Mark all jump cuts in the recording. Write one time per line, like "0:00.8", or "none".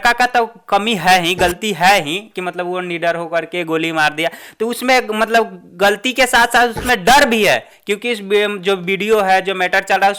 none

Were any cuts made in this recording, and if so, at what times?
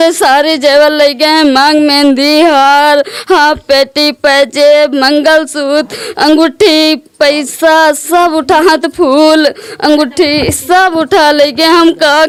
none

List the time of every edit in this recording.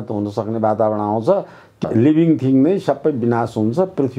0:01.6

